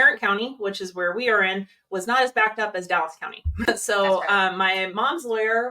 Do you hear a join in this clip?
yes; 1 cut; at 3.7 s

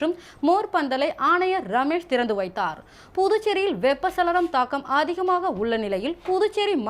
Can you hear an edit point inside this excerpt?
no; 0 cuts

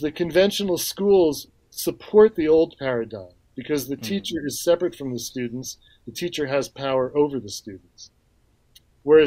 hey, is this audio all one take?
no; 1 cut; at 1.5 s

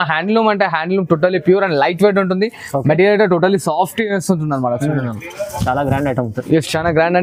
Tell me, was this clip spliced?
no; 0 cuts

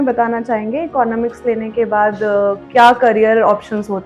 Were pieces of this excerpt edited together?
no; 0 cuts

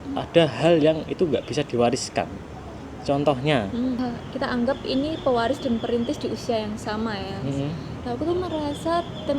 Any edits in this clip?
yes; 1 cut; at 4.0 s

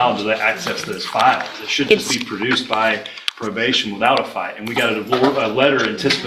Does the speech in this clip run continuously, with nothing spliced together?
yes; 0 cuts

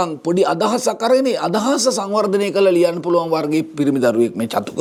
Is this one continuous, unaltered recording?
yes; 0 cuts

